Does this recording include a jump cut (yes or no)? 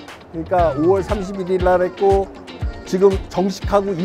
no